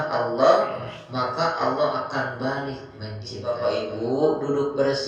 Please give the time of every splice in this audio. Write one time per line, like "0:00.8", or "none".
0:03.4